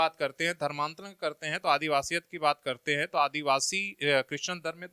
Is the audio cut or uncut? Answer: uncut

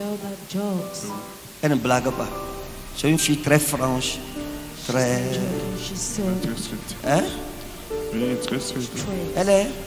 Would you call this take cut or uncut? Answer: uncut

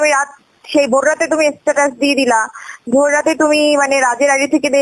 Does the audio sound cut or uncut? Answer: uncut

